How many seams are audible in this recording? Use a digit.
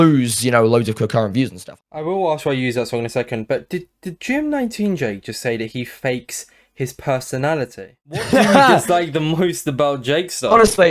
2